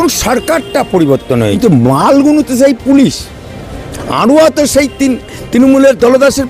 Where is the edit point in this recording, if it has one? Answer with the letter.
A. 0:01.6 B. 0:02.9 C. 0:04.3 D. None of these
A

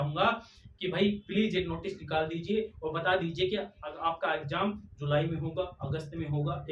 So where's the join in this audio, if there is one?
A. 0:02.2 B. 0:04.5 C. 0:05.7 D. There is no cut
D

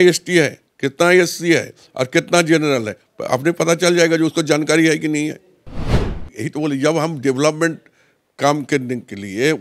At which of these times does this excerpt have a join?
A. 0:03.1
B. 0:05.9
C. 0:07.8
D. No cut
B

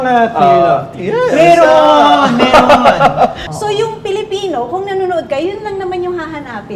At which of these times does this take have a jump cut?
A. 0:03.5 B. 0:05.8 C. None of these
A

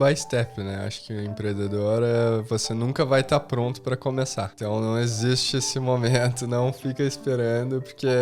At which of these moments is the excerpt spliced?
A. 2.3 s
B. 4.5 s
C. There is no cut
B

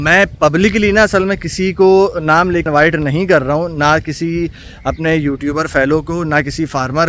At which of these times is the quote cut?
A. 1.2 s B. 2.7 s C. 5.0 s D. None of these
B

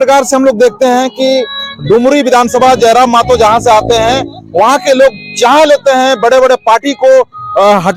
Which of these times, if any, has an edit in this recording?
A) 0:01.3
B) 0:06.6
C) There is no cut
C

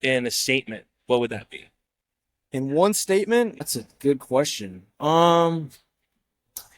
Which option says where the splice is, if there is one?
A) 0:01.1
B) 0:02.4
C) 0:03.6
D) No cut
C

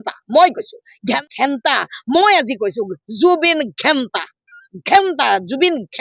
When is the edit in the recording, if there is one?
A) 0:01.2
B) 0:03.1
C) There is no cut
A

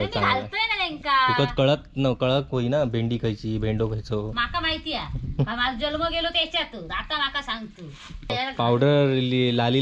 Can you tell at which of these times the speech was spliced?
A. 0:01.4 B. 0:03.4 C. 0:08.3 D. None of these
C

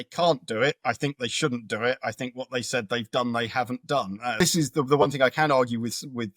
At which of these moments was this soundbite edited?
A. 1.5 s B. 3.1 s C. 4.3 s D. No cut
C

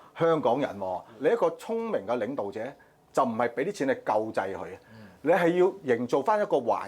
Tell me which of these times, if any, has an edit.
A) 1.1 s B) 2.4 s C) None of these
A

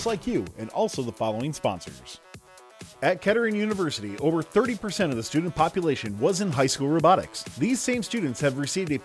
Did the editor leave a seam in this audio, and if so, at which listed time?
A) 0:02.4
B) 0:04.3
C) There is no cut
A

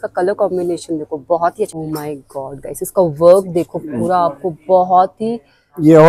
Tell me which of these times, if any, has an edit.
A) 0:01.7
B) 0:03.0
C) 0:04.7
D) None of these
A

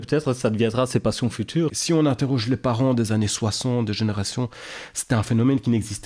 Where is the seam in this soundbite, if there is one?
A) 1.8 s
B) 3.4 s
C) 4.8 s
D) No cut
A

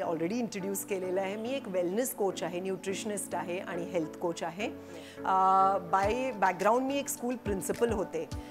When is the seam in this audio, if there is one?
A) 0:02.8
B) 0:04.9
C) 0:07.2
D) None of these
D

